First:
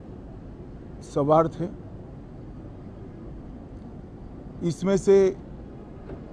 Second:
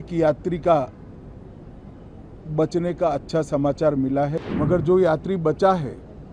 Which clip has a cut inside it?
second; 1 cut; at 4.4 s

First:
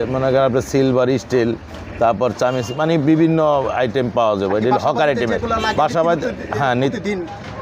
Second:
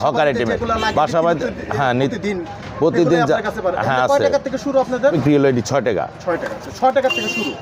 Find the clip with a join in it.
second; 1 cut; at 5.1 s

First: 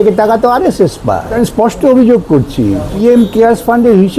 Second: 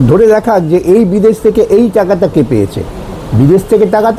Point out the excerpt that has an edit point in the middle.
first; 2 cuts; at 1.3 s, 3.0 s

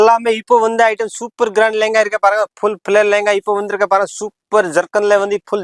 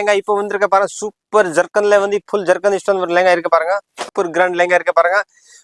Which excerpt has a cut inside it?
second; 1 cut; at 4.0 s

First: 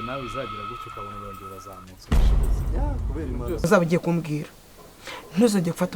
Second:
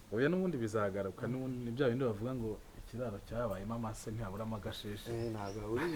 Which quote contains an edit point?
first; 1 cut; at 3.6 s

